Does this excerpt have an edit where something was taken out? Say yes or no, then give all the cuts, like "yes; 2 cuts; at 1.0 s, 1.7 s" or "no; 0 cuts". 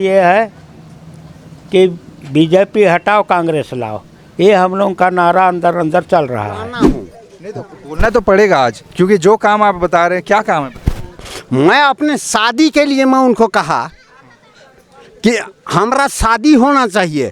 yes; 1 cut; at 6.8 s